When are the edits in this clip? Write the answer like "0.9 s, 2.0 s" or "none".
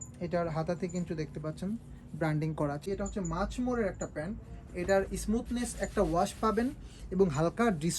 2.8 s